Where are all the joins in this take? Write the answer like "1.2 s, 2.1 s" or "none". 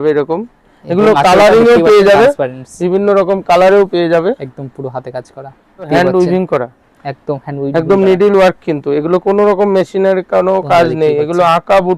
5.9 s